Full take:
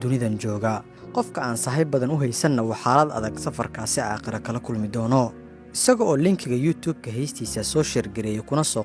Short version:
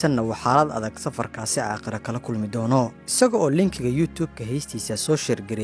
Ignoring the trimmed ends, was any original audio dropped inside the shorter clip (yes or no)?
yes